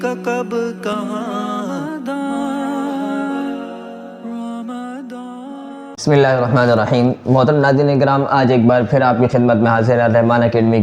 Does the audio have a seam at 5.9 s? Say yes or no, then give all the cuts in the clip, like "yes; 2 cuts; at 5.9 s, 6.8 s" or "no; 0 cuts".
yes; 1 cut; at 5.9 s